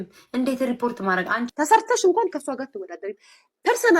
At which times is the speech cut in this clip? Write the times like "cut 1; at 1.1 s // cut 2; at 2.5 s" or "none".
cut 1; at 1.4 s